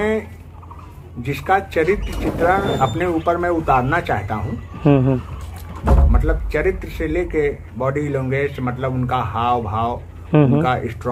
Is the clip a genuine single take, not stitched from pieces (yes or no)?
yes